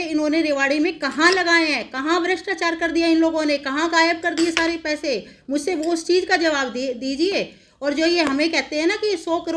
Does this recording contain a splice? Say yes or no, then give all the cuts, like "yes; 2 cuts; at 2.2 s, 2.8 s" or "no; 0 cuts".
no; 0 cuts